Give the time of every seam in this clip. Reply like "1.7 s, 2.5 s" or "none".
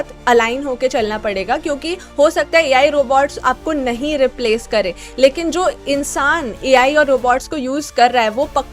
none